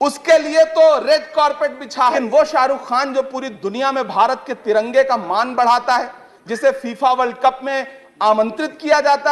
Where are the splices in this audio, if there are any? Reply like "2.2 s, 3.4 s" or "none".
2.2 s